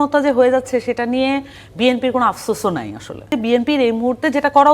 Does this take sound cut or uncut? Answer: cut